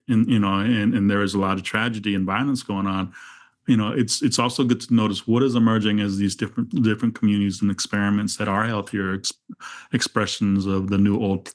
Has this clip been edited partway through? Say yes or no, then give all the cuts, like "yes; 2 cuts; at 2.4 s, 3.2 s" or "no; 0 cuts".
no; 0 cuts